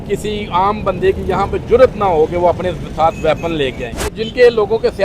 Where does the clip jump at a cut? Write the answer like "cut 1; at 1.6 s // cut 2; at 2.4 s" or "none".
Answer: cut 1; at 4.1 s